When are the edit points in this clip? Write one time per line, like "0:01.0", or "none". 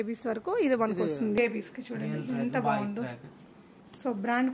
0:01.4